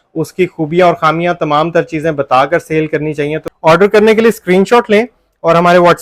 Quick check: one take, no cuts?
no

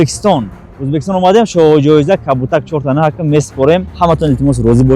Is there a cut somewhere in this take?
yes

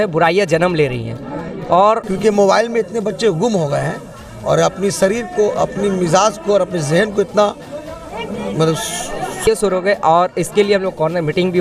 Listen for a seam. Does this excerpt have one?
yes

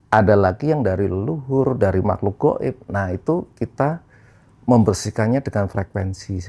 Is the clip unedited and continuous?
yes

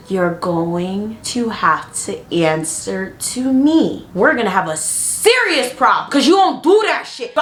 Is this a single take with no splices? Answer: yes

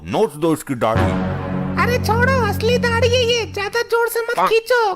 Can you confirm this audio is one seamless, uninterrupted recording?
yes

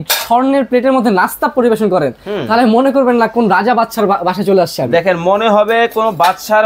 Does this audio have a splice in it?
no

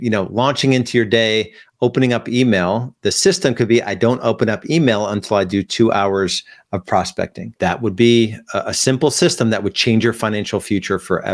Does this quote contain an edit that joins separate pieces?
yes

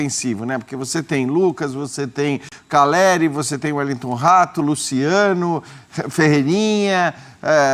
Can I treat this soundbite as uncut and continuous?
yes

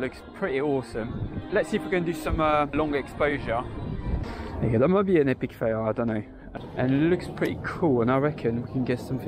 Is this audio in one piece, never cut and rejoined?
no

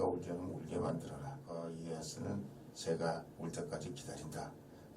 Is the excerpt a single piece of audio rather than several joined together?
no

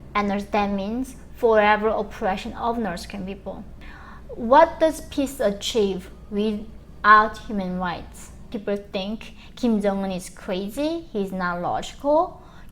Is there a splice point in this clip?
yes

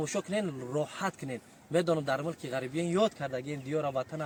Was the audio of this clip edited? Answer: no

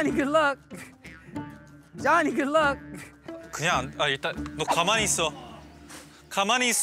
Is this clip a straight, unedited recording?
no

